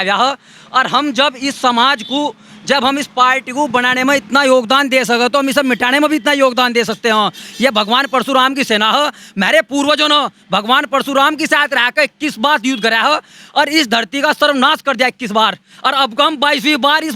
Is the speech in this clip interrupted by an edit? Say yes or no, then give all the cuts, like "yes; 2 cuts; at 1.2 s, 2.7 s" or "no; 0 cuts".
no; 0 cuts